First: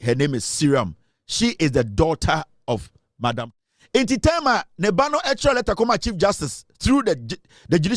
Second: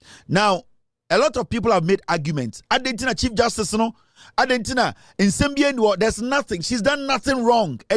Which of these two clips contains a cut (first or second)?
first